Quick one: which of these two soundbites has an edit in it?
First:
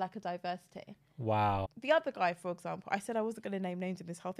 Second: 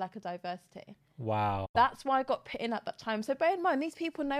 first; 1 cut; at 1.7 s

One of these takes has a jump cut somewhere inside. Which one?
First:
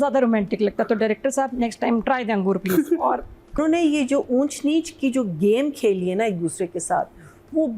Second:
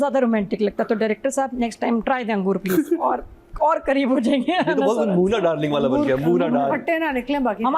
first; 1 cut; at 3.6 s

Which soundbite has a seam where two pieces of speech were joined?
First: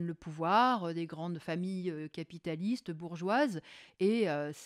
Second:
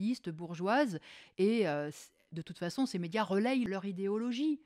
second; 1 cut; at 3.7 s

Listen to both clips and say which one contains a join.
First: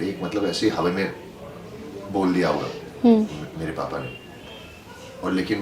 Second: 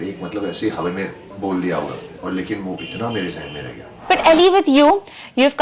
second; 3 cuts; at 1.2 s, 2.1 s, 3.9 s

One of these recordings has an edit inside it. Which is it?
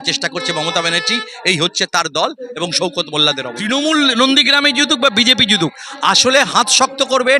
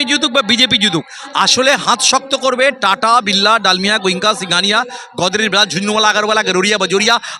first; 1 cut; at 3.5 s

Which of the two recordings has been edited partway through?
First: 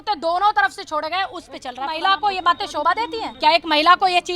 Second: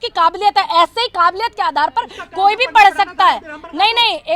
first; 2 cuts; at 2.0 s, 3.2 s

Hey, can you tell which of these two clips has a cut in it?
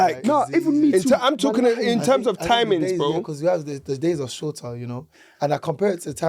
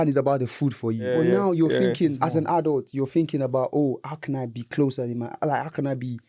second; 1 cut; at 1.1 s

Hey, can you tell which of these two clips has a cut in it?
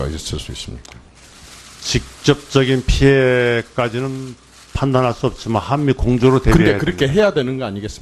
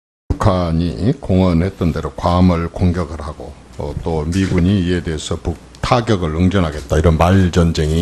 first; 1 cut; at 2.2 s

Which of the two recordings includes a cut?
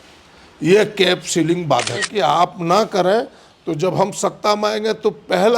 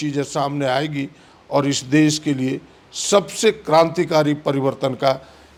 first; 1 cut; at 2.1 s

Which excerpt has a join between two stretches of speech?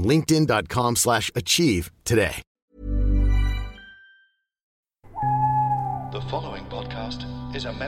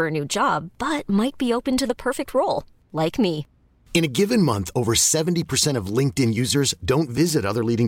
first; 1 cut; at 4.9 s

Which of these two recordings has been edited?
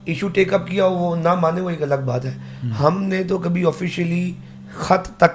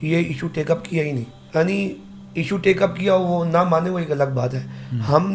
second; 1 cut; at 1.4 s

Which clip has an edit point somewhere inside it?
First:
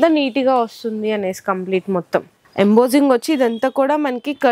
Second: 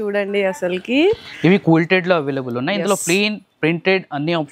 first; 1 cut; at 2.5 s

